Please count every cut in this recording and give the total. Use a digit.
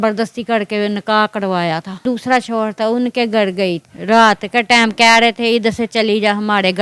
2